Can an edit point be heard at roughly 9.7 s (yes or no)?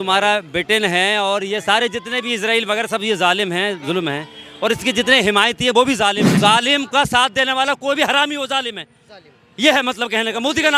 no